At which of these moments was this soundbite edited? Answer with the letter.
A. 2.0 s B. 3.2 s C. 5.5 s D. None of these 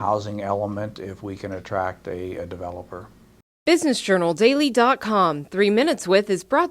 B